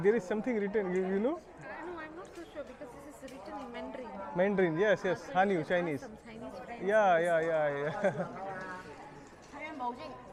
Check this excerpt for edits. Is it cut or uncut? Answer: uncut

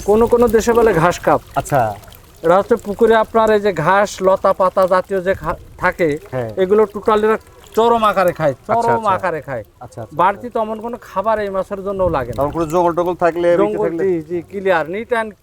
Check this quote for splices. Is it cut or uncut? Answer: uncut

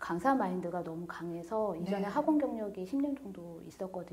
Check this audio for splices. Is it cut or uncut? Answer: uncut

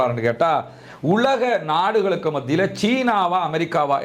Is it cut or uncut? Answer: uncut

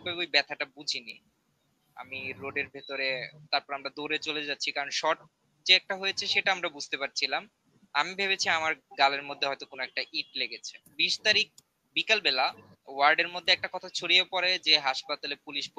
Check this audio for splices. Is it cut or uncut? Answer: cut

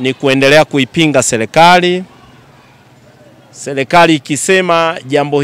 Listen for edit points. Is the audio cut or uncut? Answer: uncut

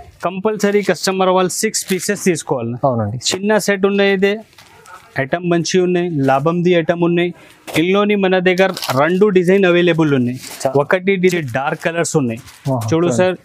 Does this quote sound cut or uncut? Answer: cut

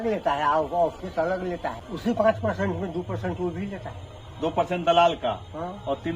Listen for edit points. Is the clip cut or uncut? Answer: cut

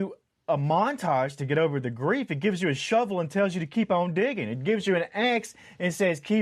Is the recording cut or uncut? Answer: uncut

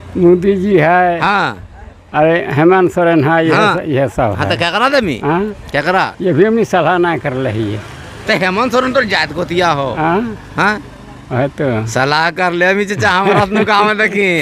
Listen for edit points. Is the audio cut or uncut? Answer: uncut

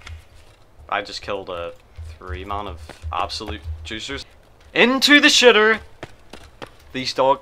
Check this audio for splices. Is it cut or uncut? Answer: cut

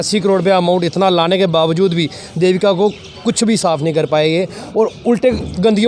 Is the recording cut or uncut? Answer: uncut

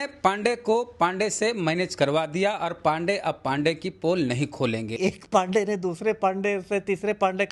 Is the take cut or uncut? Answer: cut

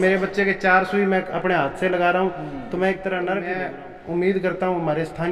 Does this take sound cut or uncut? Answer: cut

